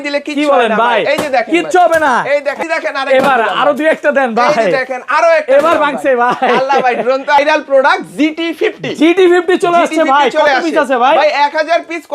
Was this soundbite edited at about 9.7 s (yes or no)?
no